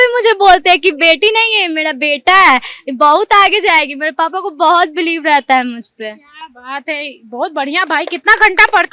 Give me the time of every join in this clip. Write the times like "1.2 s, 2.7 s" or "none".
none